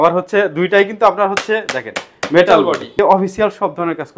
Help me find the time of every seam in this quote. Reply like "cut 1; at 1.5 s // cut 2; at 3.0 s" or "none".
cut 1; at 3.0 s